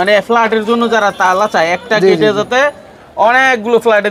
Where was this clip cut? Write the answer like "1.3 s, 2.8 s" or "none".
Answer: none